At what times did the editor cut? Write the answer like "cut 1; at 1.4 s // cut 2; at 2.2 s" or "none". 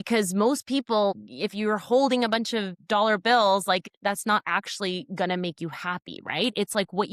cut 1; at 1.1 s // cut 2; at 2.8 s // cut 3; at 3.8 s